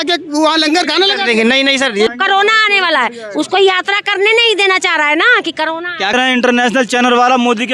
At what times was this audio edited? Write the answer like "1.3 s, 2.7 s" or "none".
2.1 s, 6.1 s